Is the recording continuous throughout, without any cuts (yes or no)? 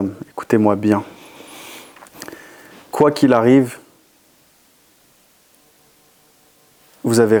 yes